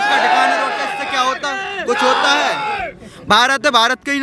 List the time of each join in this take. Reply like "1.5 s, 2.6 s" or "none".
none